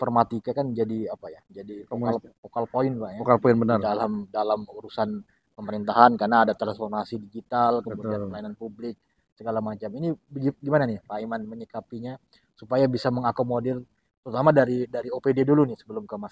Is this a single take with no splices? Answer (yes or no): yes